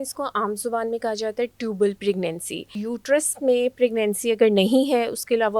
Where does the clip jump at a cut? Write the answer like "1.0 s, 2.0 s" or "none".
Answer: 2.8 s